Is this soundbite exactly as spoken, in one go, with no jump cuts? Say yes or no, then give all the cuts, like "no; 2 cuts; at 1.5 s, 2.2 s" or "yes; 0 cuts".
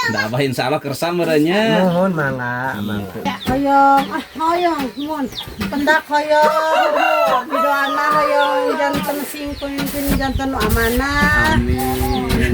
no; 1 cut; at 3.3 s